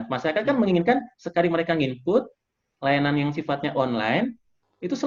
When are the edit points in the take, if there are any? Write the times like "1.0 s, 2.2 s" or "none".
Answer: none